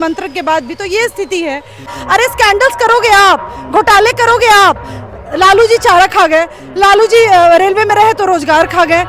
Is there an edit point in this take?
yes; 1 cut; at 2.0 s

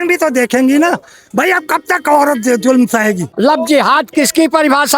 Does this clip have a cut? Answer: yes; 1 cut; at 3.3 s

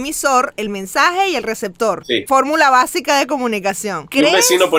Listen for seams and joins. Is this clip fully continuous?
yes; 0 cuts

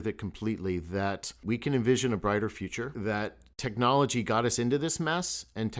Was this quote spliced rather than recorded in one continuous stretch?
yes; 2 cuts; at 1.4 s, 2.9 s

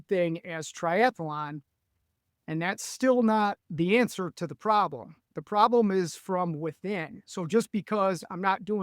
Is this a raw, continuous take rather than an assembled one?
yes; 0 cuts

